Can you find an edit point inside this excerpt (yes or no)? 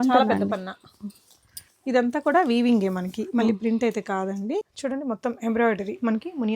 yes